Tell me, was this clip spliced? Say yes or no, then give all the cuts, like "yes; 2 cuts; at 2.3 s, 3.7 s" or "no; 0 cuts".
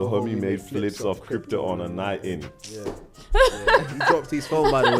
no; 0 cuts